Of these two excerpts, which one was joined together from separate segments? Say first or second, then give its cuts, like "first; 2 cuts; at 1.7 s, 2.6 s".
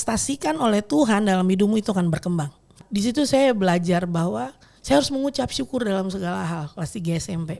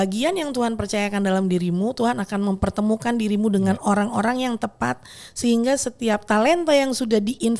first; 1 cut; at 2.8 s